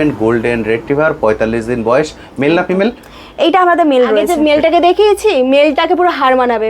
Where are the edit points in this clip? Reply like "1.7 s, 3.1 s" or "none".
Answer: 4.2 s